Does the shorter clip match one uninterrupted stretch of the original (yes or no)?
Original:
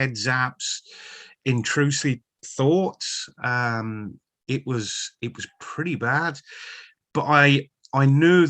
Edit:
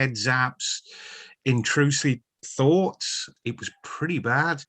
no